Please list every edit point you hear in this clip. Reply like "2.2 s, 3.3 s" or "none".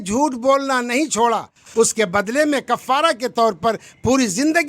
1.6 s